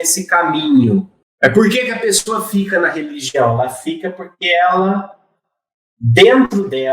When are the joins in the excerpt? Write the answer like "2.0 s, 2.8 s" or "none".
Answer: 1.2 s